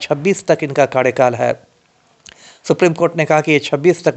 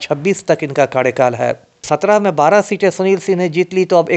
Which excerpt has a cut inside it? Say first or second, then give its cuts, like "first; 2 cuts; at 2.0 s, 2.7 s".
second; 1 cut; at 1.8 s